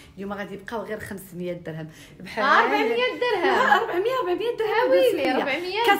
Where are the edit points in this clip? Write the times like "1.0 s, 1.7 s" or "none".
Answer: none